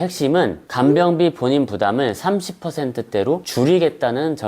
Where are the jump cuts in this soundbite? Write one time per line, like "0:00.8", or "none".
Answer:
0:03.5